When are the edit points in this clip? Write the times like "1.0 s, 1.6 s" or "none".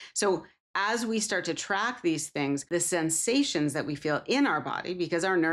2.6 s